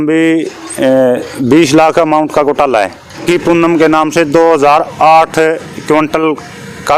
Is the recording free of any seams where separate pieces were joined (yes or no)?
no